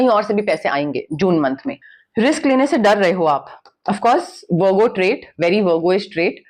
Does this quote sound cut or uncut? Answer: uncut